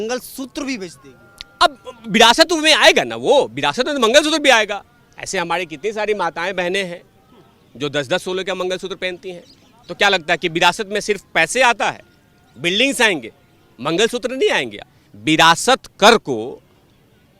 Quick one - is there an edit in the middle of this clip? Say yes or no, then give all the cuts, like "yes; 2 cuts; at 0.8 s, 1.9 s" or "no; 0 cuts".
yes; 1 cut; at 14.8 s